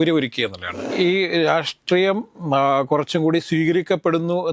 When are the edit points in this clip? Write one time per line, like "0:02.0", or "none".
0:00.9